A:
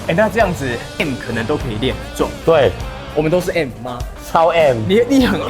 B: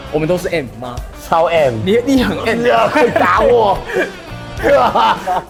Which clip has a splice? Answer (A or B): A